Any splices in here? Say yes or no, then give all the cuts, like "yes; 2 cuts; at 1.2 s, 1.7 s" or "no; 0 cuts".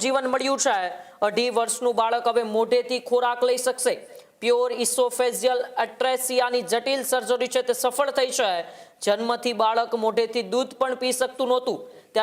no; 0 cuts